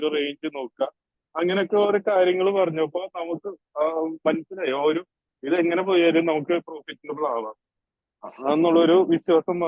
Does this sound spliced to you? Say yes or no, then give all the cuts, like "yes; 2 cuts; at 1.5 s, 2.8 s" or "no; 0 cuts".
no; 0 cuts